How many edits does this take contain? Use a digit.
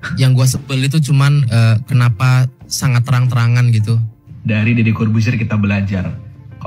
1